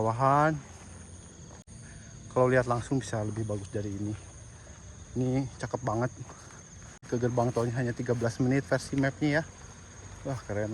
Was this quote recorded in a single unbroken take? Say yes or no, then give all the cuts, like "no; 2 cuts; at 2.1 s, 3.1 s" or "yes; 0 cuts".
no; 2 cuts; at 1.6 s, 7.0 s